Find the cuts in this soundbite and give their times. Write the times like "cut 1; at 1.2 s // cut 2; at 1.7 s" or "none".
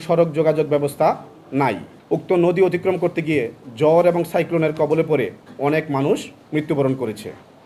cut 1; at 1.9 s

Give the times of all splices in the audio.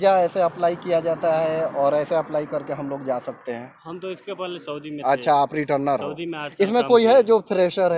none

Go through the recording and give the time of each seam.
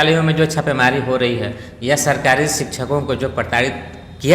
none

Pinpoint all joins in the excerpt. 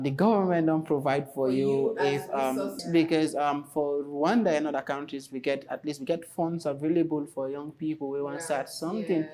cut 1; at 2.8 s

